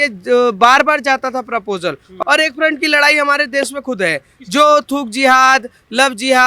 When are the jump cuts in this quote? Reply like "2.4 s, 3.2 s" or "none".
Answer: 2.1 s